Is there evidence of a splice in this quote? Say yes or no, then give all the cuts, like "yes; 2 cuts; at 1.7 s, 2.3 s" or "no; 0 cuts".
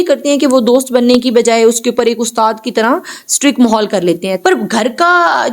yes; 1 cut; at 4.3 s